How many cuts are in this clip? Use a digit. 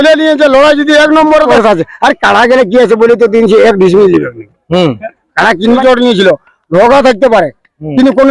2